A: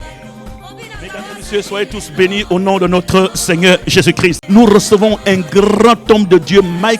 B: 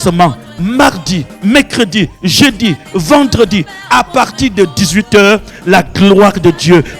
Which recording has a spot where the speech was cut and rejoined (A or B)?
A